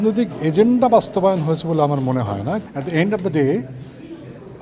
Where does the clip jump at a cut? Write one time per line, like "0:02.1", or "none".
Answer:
0:02.6